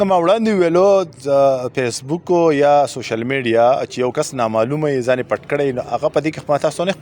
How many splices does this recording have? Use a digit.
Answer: 0